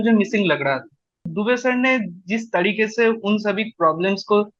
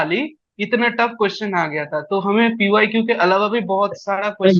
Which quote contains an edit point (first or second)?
first